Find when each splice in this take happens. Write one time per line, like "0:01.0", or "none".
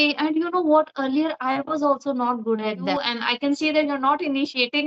0:02.9

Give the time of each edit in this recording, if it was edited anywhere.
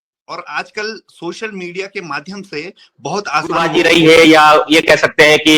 0:03.7

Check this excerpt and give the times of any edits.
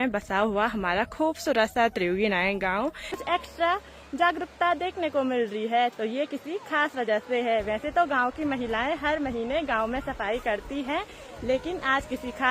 0:03.0

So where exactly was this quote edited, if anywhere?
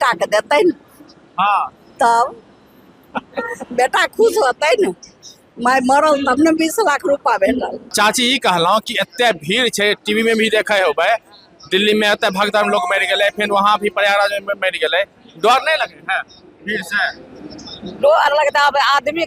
0:07.8

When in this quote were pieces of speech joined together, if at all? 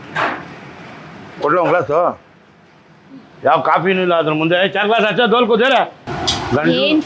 none

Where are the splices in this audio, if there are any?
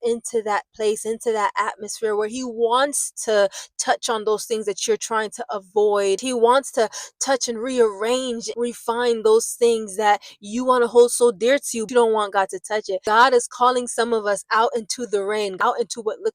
0:06.2
0:08.4
0:11.8
0:13.0
0:15.5

